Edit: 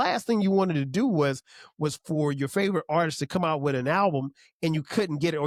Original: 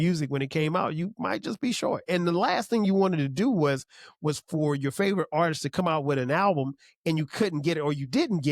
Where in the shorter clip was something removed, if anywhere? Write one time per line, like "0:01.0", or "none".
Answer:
none